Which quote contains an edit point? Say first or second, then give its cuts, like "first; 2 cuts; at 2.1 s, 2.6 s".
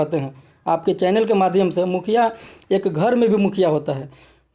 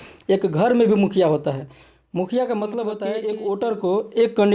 second; 1 cut; at 3.1 s